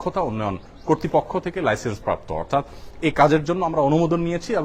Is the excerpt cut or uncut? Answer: uncut